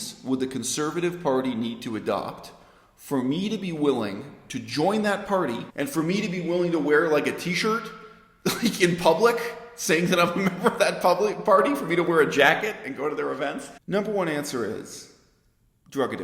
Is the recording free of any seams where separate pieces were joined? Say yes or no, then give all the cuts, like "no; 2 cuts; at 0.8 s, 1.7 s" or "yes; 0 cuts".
no; 2 cuts; at 5.7 s, 13.7 s